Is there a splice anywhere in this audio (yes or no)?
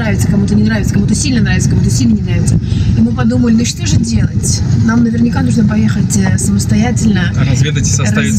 no